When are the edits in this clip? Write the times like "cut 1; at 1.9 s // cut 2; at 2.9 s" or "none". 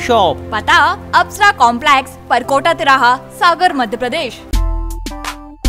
cut 1; at 4.4 s

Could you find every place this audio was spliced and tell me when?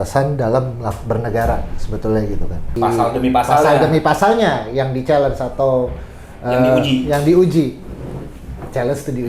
cut 1; at 2.8 s

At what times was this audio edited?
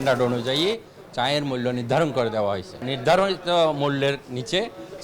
cut 1; at 2.9 s

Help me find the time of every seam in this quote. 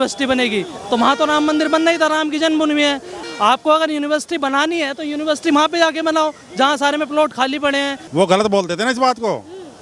cut 1; at 3.2 s // cut 2; at 8.0 s

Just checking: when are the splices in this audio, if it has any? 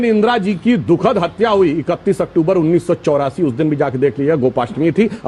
none

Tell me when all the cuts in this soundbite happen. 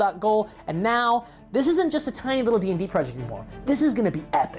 cut 1; at 1.9 s

